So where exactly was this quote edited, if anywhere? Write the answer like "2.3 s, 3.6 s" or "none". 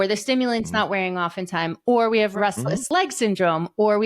2.4 s